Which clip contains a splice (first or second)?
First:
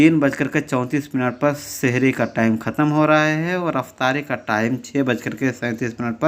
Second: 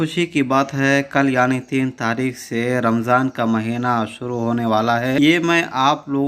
second